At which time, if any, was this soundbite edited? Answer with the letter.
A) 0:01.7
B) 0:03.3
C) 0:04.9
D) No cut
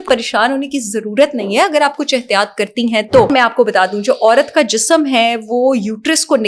B